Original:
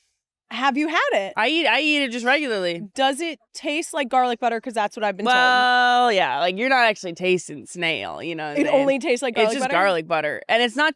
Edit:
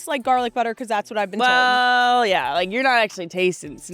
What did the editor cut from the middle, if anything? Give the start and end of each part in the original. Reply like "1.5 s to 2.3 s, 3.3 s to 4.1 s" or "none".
none